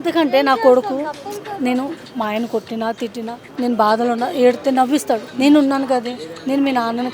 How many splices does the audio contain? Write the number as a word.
two